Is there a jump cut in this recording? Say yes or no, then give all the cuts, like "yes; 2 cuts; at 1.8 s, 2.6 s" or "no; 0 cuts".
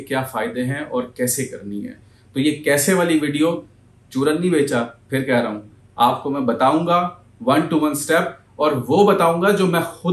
no; 0 cuts